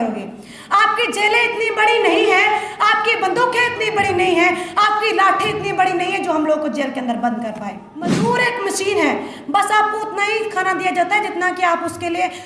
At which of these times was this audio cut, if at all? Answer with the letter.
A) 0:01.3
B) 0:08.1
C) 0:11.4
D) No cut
B